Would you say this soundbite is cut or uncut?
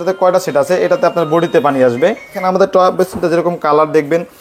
cut